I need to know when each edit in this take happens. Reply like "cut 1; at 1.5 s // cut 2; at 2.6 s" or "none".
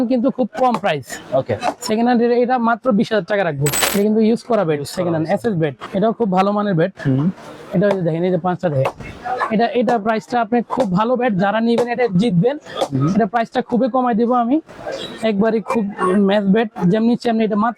cut 1; at 3.8 s // cut 2; at 5.8 s